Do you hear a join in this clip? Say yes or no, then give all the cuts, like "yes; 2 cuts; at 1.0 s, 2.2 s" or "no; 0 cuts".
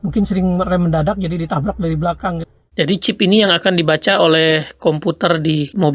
yes; 1 cut; at 2.6 s